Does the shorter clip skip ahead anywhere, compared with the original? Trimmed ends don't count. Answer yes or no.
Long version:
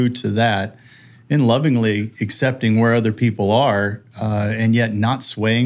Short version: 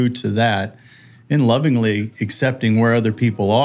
no